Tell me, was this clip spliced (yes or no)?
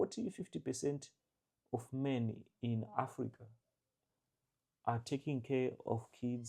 no